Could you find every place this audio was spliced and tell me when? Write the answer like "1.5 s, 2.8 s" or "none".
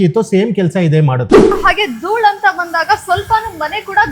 1.5 s